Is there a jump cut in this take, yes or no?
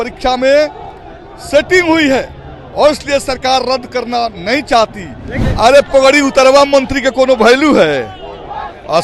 yes